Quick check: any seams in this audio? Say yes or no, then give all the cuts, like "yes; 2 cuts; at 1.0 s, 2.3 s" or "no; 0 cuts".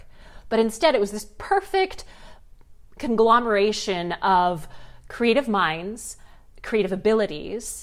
no; 0 cuts